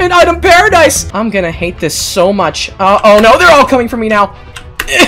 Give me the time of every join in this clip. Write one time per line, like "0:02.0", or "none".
0:01.0